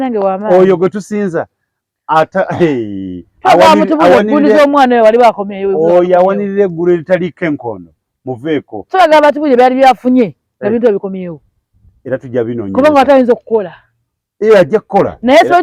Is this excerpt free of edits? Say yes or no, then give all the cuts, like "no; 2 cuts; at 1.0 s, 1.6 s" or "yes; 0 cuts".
yes; 0 cuts